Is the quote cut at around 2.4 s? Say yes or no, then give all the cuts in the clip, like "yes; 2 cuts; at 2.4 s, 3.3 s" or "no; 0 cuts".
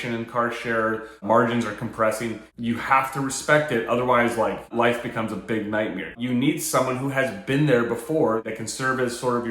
yes; 2 cuts; at 2.4 s, 6.1 s